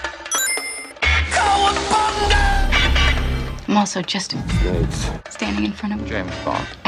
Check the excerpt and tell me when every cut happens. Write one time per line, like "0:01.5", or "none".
none

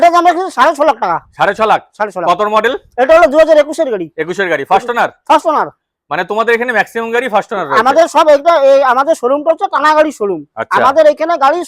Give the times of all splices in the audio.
none

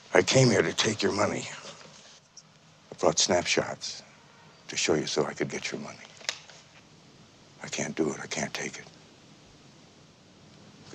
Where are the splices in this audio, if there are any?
0:02.3
0:06.5

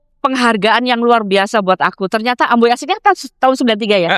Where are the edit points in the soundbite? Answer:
none

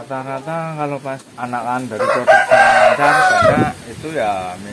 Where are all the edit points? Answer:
0:01.3

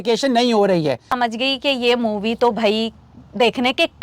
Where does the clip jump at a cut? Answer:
0:01.1

